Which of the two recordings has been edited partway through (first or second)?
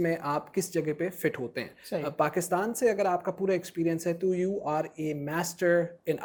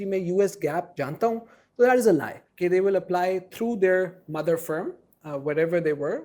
second